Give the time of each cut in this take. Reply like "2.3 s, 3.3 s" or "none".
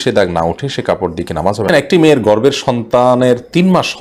1.7 s